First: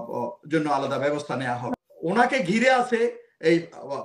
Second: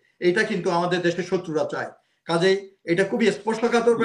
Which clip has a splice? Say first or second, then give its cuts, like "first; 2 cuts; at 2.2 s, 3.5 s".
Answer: first; 1 cut; at 1.7 s